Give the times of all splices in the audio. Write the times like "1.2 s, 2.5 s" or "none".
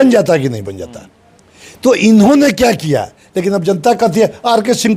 none